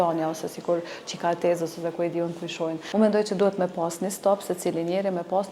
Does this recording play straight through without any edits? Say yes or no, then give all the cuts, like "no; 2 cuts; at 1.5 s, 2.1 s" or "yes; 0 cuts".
no; 1 cut; at 2.8 s